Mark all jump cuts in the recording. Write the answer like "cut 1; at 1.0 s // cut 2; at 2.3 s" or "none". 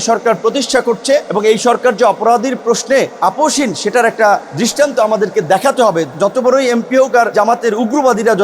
cut 1; at 1.3 s // cut 2; at 3.1 s // cut 3; at 4.5 s // cut 4; at 6.1 s // cut 5; at 7.3 s